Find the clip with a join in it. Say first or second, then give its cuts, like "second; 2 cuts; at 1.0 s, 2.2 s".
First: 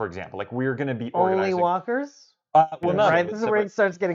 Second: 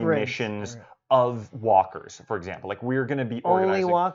first; 1 cut; at 3.1 s